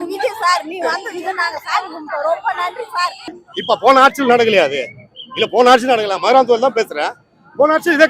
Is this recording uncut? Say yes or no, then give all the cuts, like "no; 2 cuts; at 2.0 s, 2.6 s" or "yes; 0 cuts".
no; 1 cut; at 3.4 s